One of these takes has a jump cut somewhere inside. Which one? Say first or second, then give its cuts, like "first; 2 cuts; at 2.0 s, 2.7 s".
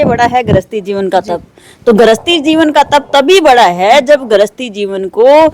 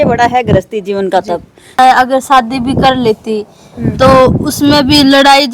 second; 1 cut; at 1.8 s